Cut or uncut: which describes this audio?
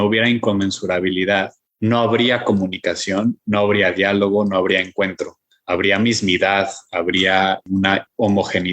cut